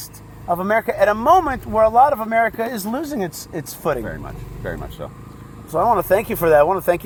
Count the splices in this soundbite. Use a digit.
0